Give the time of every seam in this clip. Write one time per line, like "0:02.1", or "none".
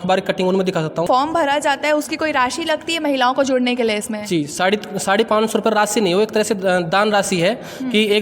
0:01.1